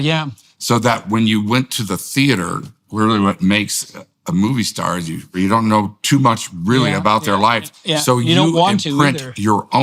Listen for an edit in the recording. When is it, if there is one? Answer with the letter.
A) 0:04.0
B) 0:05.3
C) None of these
B